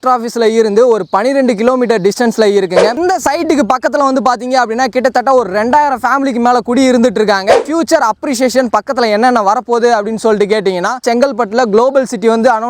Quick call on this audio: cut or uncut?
cut